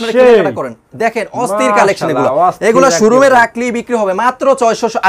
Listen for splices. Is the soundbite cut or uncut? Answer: uncut